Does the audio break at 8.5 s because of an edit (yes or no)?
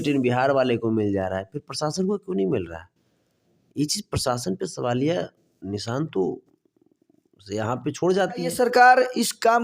yes